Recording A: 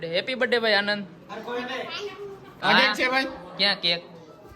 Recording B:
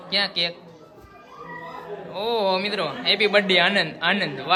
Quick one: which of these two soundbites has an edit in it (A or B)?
A